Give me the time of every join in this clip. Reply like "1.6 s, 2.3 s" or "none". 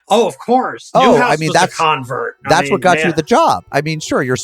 0.9 s